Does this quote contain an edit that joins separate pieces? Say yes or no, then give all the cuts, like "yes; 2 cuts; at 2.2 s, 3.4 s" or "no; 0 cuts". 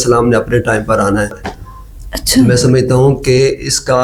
no; 0 cuts